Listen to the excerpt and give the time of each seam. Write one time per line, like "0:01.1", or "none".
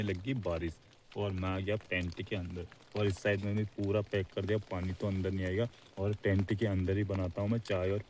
none